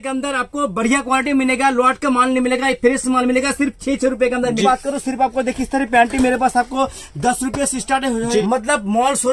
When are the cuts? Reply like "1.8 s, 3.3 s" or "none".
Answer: 4.6 s, 8.4 s